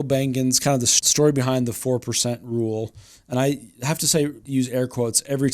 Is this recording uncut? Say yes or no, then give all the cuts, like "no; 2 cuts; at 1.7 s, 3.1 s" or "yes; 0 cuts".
no; 2 cuts; at 0.9 s, 4.4 s